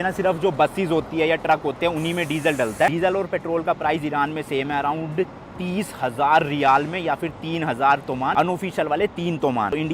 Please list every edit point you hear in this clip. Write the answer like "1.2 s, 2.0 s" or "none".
2.9 s